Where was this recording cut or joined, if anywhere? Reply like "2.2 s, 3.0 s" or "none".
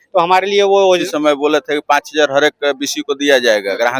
1.0 s